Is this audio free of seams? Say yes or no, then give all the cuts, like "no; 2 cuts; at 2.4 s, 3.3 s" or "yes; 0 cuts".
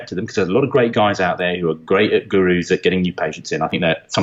yes; 0 cuts